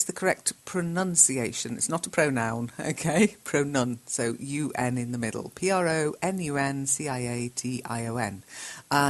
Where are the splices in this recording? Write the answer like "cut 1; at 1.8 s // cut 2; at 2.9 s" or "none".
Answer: cut 1; at 3.7 s